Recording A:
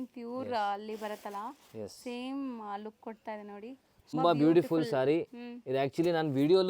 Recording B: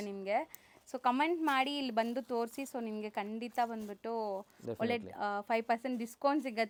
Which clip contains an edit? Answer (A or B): A